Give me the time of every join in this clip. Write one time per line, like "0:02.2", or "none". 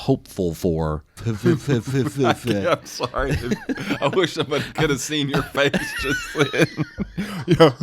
0:01.1